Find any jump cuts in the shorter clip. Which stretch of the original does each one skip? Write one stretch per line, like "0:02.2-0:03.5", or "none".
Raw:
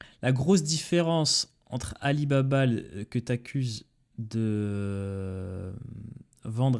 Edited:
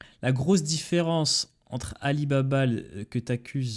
none